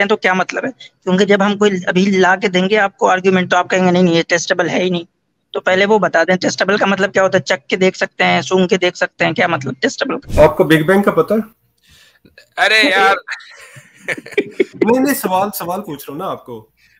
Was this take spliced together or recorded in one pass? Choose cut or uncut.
cut